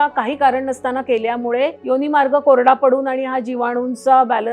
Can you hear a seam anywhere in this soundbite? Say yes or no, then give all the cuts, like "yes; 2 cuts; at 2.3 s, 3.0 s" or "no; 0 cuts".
yes; 1 cut; at 1.8 s